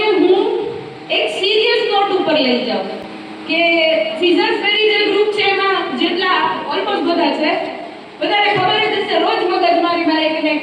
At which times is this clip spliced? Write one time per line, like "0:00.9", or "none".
none